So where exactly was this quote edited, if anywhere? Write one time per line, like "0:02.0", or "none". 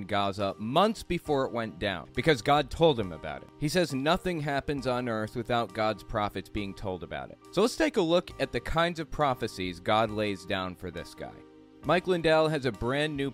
0:11.6